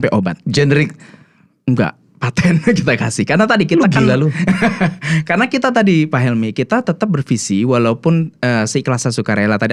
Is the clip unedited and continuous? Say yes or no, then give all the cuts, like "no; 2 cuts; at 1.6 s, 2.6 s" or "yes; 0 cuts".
yes; 0 cuts